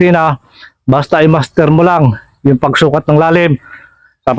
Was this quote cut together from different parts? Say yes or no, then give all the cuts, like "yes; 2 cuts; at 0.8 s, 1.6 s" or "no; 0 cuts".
no; 0 cuts